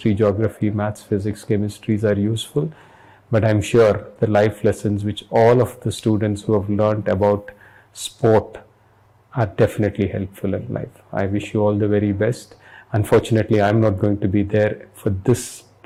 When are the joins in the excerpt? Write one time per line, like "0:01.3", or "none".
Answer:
none